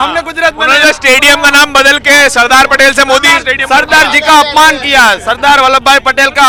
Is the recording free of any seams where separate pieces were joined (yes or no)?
yes